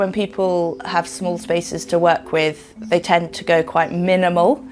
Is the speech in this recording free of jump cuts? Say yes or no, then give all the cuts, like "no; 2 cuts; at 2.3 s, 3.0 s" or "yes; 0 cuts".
yes; 0 cuts